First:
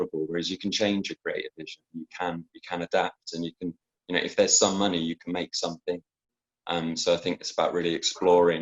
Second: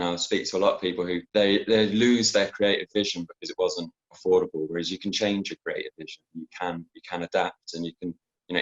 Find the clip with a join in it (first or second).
second